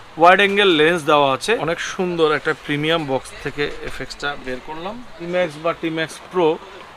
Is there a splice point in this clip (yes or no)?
yes